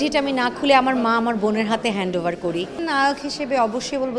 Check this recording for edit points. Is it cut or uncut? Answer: cut